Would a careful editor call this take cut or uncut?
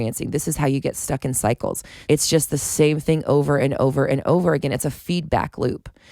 cut